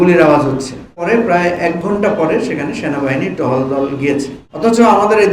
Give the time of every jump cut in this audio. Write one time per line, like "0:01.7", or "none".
0:01.0
0:04.4